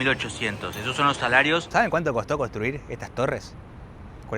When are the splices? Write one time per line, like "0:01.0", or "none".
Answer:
0:01.7